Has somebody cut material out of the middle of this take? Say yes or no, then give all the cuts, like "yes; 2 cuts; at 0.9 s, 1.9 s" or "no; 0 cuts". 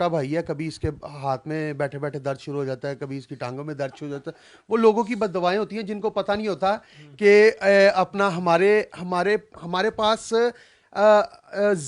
no; 0 cuts